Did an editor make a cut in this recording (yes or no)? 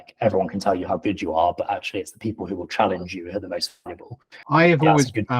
yes